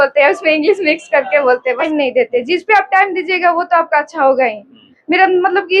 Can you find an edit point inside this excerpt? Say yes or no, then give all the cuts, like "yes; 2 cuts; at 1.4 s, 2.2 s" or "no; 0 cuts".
yes; 1 cut; at 1.9 s